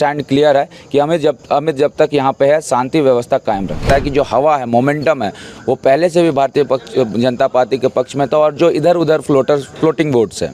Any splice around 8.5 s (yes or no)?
no